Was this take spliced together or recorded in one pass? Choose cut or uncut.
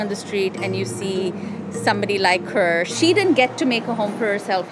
cut